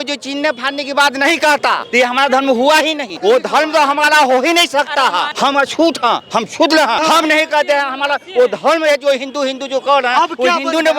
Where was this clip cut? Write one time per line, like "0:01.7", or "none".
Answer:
0:01.8
0:03.1
0:05.3
0:07.0

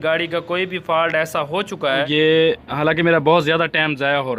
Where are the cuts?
0:02.1

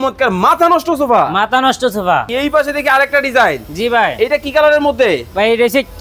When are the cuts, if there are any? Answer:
0:02.3

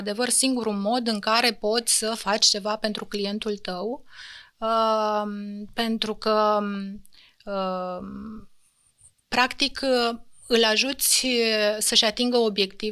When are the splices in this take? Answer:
none

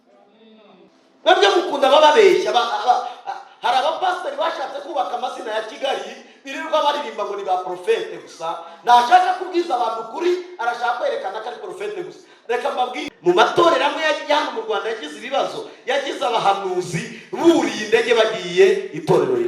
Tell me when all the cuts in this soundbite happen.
0:00.9
0:13.1

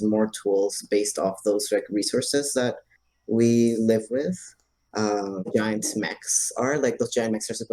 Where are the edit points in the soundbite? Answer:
0:05.5

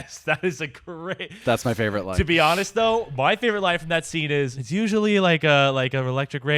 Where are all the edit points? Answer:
0:04.6

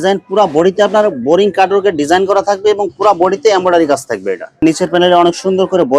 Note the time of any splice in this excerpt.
0:04.6

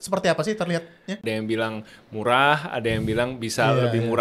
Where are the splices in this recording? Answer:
0:01.2

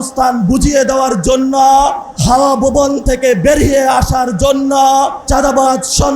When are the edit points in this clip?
0:02.1
0:05.2

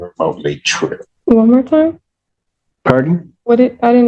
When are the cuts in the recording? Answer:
0:01.1

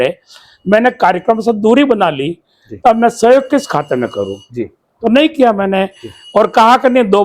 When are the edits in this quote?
none

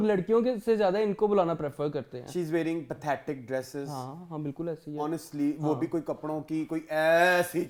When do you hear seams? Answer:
none

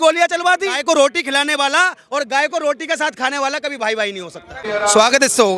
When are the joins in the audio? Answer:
0:00.8
0:04.6

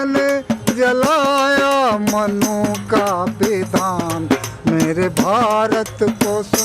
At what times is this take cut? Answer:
none

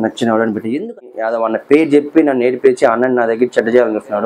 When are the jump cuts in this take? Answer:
0:00.9

